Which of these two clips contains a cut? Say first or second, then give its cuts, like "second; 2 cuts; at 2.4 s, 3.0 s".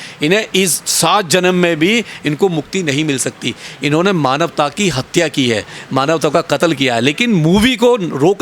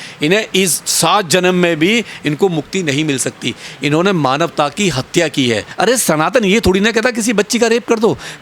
second; 1 cut; at 5.7 s